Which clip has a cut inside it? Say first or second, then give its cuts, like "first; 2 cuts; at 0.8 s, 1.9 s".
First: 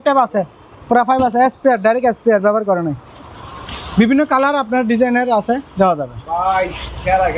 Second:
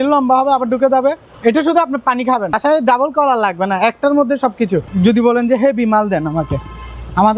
second; 3 cuts; at 1.3 s, 2.6 s, 4.9 s